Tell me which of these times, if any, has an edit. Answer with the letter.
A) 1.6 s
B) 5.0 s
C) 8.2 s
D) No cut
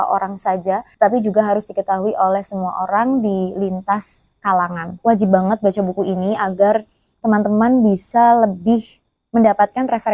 B